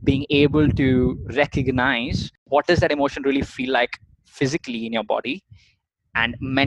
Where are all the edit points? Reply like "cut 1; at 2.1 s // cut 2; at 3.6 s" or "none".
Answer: cut 1; at 2.4 s